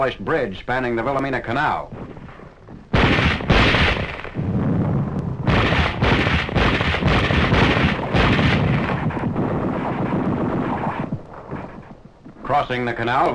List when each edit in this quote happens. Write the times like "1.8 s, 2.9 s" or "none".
1.1 s